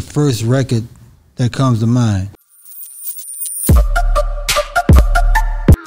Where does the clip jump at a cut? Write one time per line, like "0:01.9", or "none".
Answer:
0:02.4

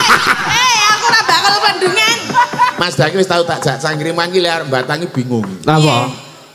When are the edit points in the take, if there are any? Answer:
0:02.8

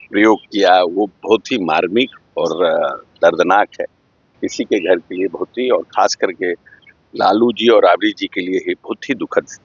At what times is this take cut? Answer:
0:04.3

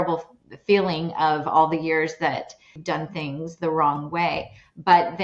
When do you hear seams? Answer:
0:02.8

